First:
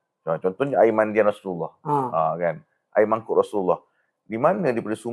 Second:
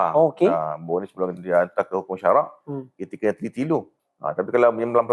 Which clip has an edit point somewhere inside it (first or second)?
second